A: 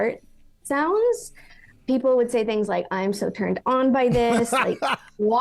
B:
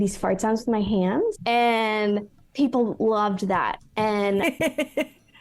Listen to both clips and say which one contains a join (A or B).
B